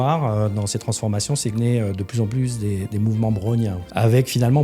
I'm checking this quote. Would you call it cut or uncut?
cut